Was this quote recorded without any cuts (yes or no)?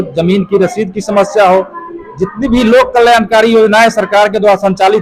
yes